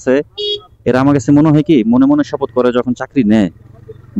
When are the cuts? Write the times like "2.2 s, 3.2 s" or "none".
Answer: none